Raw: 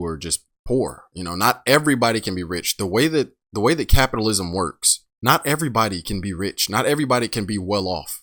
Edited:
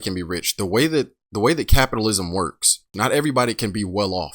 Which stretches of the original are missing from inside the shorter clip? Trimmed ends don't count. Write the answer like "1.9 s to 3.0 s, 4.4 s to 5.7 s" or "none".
5.1 s to 6.6 s